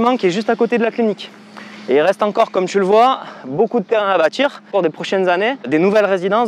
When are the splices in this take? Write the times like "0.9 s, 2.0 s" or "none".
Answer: 4.7 s, 5.7 s